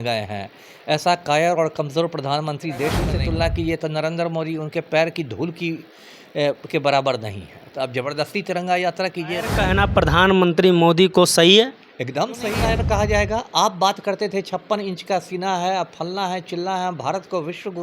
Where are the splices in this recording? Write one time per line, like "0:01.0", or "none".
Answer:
0:03.1
0:09.6
0:12.6